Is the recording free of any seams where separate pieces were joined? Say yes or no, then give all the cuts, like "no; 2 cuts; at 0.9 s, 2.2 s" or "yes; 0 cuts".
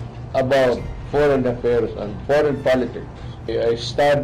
no; 3 cuts; at 0.9 s, 2.1 s, 3.5 s